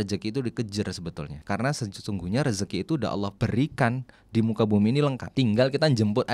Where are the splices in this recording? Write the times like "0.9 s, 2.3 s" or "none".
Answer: 1.3 s, 3.3 s, 5.2 s

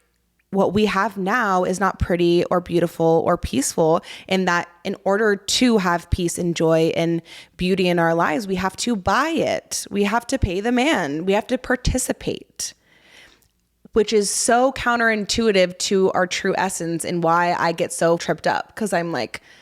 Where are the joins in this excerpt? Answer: 18.2 s

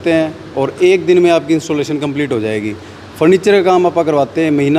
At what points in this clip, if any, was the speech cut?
none

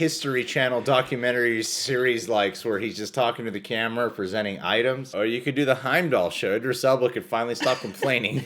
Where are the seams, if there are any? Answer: 5.1 s

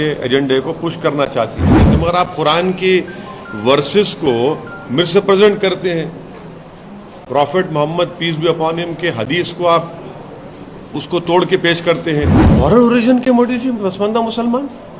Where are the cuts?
1.9 s, 12.4 s

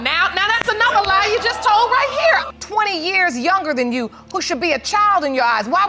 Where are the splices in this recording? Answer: 2.5 s

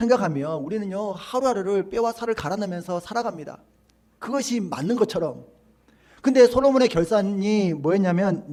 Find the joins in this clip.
none

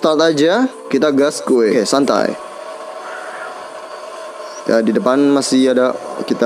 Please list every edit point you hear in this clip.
1.7 s

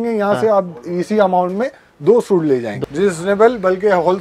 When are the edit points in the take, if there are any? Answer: 2.7 s

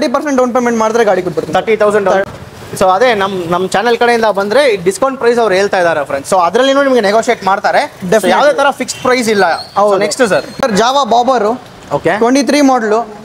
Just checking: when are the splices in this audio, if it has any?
2.3 s, 10.6 s

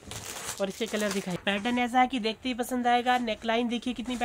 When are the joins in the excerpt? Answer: 1.4 s

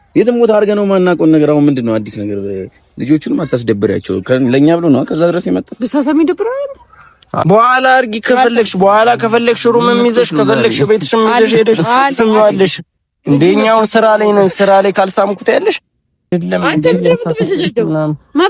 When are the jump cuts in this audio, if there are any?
7.4 s, 16.3 s

